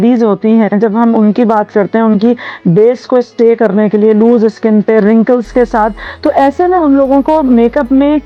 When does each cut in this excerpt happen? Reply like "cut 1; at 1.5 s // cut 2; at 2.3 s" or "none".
none